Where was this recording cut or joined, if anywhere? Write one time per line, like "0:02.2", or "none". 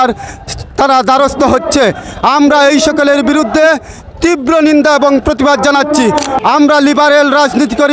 0:06.3